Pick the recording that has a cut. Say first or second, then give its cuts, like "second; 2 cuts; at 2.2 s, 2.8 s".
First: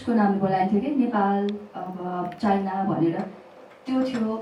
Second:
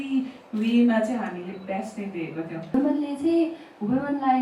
second; 1 cut; at 2.7 s